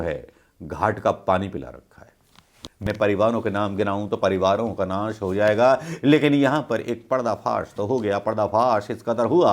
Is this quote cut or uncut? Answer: cut